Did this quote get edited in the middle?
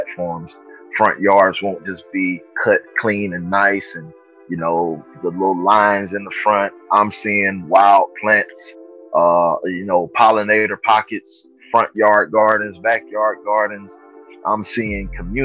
no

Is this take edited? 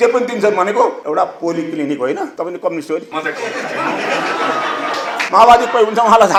no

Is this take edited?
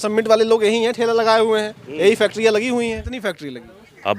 yes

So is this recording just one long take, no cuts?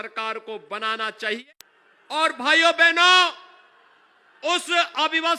no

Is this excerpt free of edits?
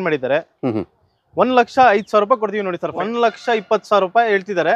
no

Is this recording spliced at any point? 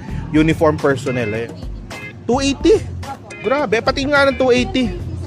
yes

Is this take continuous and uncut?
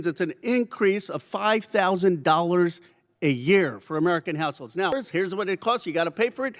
no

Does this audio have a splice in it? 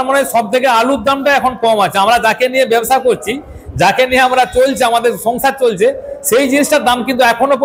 no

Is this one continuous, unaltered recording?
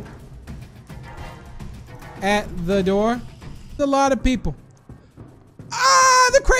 no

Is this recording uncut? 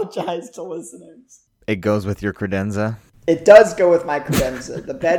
no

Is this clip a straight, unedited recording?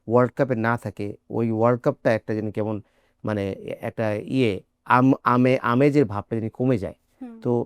yes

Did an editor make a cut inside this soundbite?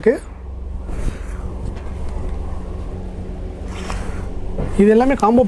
no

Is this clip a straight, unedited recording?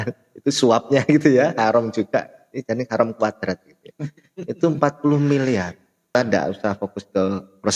no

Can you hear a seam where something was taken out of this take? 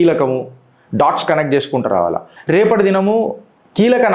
yes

